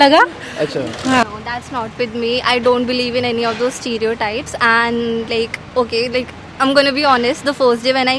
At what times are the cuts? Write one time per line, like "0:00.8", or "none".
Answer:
0:01.2